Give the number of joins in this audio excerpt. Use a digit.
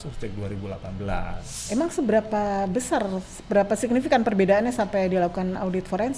1